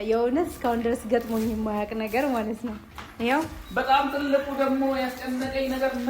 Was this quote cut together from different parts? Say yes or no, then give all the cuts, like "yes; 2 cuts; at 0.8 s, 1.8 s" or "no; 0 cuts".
yes; 1 cut; at 3.6 s